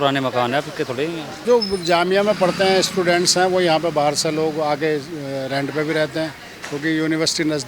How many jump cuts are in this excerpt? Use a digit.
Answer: 1